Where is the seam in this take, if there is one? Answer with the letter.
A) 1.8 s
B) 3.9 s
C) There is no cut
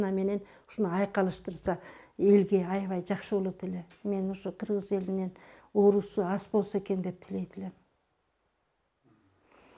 C